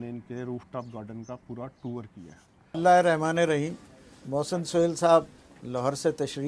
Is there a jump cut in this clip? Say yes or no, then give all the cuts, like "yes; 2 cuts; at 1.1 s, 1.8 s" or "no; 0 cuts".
yes; 1 cut; at 2.7 s